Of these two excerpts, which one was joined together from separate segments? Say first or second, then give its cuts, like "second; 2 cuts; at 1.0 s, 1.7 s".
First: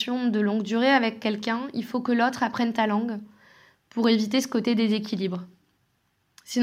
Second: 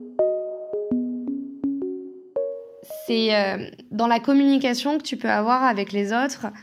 second; 1 cut; at 2.5 s